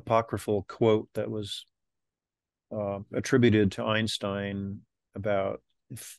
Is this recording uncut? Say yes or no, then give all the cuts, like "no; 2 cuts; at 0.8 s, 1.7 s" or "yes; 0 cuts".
yes; 0 cuts